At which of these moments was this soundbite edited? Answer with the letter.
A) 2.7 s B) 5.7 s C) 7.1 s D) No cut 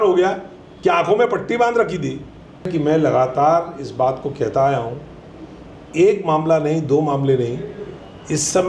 A